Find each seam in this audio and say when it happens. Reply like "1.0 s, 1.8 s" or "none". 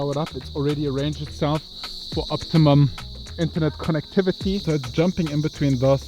4.6 s